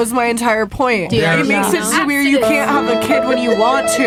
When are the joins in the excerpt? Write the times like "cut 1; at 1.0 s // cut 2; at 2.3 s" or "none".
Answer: none